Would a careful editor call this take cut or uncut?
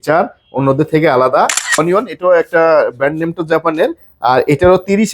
cut